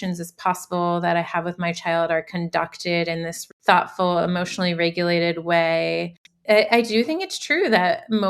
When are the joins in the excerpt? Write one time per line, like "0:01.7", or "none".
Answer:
0:03.4
0:06.2

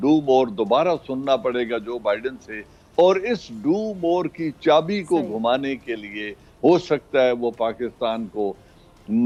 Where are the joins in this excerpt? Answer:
none

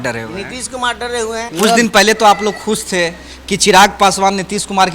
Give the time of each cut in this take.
0:01.5

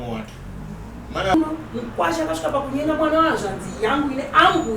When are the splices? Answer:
0:01.3

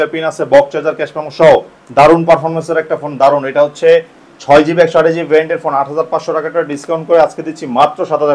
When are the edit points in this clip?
none

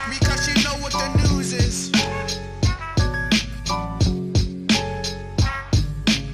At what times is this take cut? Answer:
0:04.6

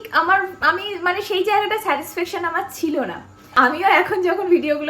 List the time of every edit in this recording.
0:03.5

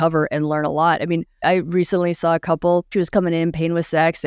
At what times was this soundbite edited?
0:01.3
0:02.9

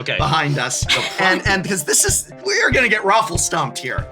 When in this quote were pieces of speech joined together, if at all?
0:02.4

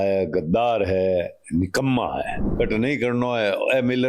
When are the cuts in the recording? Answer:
0:02.5

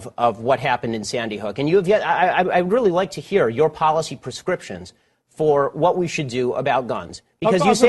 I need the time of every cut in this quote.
0:03.2

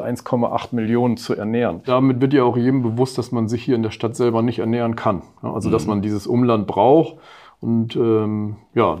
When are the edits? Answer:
0:01.9

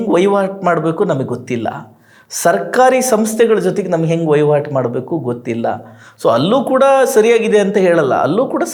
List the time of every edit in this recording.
none

